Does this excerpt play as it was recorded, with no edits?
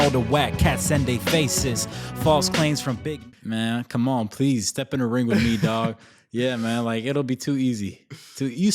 no; 1 cut; at 3.1 s

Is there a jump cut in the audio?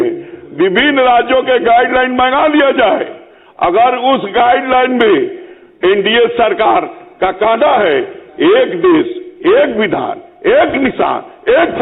no; 0 cuts

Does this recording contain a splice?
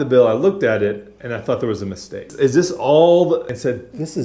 no; 0 cuts

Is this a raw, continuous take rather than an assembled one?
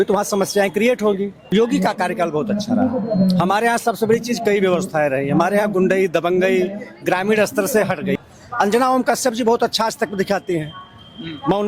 no; 2 cuts; at 1.4 s, 8.2 s

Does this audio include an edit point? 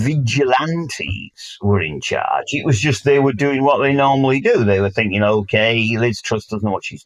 no; 0 cuts

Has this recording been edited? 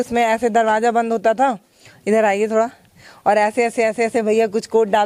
no; 0 cuts

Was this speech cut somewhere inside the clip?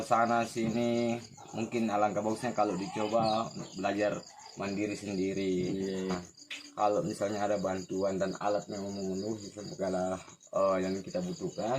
yes; 1 cut; at 6.1 s

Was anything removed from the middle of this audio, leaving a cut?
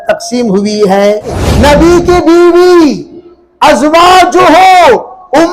yes; 1 cut; at 1.4 s

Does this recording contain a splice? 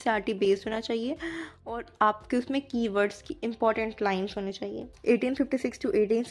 yes; 1 cut; at 4.9 s

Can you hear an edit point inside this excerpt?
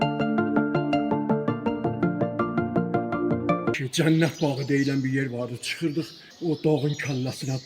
yes; 2 cuts; at 3.8 s, 6.2 s

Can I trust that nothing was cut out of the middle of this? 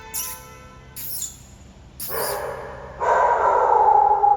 yes; 0 cuts

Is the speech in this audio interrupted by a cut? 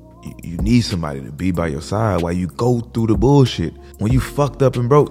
yes; 1 cut; at 3.8 s

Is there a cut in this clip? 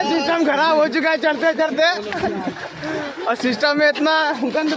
no; 0 cuts

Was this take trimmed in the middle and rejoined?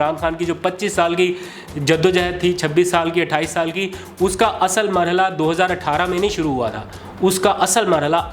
no; 0 cuts

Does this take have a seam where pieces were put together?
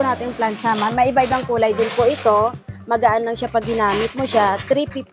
no; 0 cuts

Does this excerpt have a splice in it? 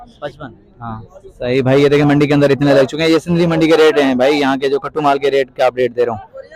no; 0 cuts

